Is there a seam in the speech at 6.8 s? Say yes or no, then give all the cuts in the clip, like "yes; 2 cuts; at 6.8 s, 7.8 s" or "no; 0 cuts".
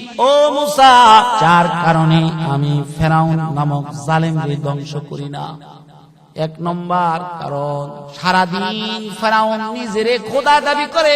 no; 2 cuts; at 1.4 s, 8.0 s